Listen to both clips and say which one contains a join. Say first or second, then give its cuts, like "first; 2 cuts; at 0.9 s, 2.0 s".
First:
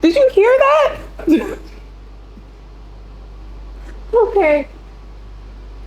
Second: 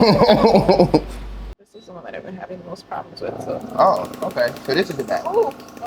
second; 1 cut; at 1.8 s